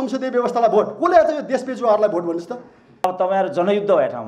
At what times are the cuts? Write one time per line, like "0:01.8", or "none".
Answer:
0:03.0